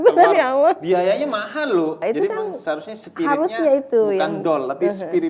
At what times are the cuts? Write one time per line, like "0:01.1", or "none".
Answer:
0:02.0